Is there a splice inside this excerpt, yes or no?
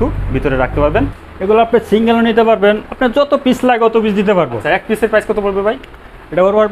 yes